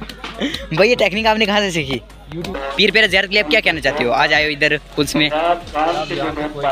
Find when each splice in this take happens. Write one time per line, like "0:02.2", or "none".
0:02.6